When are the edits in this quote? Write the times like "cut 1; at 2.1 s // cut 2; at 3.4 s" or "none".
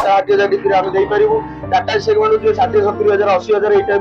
none